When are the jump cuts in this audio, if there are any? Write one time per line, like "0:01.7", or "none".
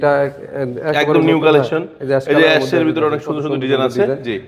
none